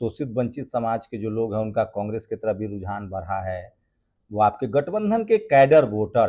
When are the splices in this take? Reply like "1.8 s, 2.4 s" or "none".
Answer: none